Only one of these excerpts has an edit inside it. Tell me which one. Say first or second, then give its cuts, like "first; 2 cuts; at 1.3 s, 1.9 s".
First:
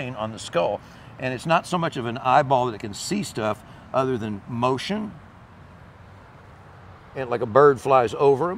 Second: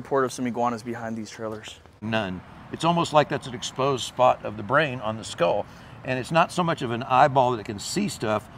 second; 1 cut; at 2.0 s